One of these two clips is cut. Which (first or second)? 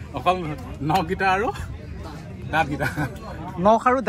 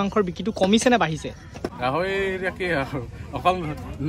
second